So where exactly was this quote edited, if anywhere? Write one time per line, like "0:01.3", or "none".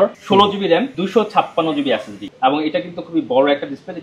0:01.0
0:02.2